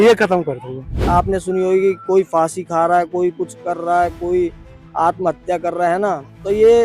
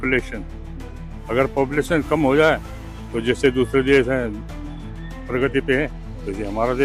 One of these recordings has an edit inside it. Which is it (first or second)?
first